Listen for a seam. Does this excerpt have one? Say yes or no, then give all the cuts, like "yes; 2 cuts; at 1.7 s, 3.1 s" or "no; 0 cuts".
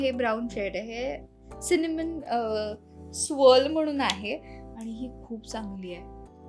no; 0 cuts